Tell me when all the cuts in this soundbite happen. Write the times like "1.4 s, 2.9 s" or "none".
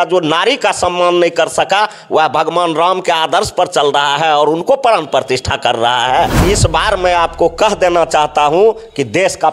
6.4 s